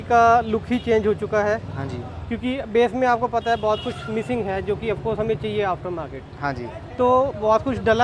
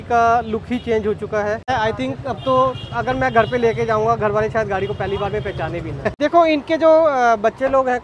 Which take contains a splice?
second; 2 cuts; at 1.7 s, 6.1 s

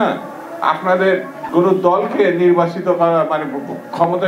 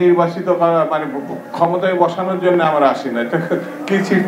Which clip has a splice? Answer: first; 1 cut; at 1.4 s

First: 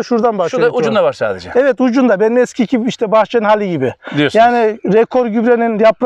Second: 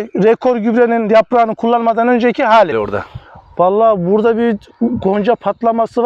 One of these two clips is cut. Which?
second; 1 cut; at 2.7 s

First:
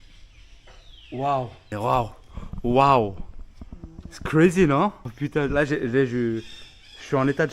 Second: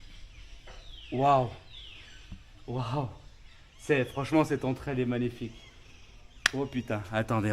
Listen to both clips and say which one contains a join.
first; 2 cuts; at 1.7 s, 5.1 s

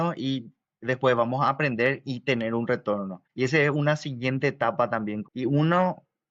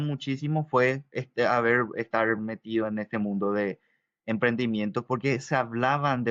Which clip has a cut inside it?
first; 2 cuts; at 3.2 s, 5.2 s

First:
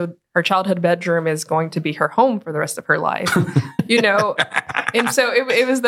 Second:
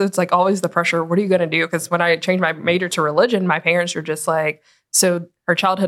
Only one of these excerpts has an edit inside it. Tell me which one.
first; 1 cut; at 3.7 s

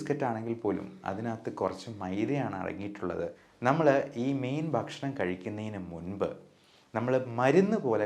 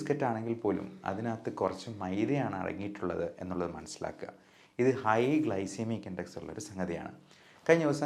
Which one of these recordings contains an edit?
first; 1 cut; at 3.4 s

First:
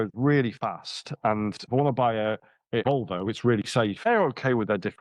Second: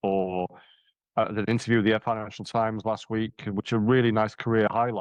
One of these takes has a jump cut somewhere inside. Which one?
first; 3 cuts; at 1.6 s, 2.8 s, 4.1 s

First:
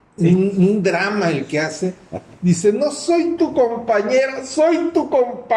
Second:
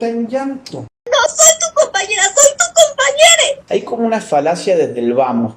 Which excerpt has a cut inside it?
second; 1 cut; at 3.6 s

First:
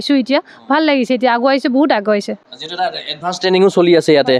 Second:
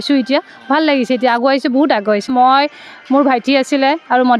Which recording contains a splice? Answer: second; 1 cut; at 2.3 s

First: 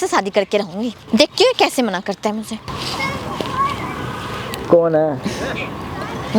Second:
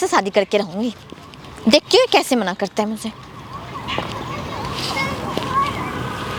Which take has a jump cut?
first; 2 cuts; at 1.0 s, 2.7 s

